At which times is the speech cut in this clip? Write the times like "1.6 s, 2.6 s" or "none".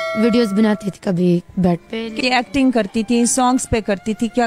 2.2 s